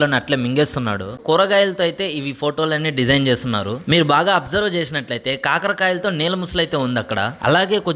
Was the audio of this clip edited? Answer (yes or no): yes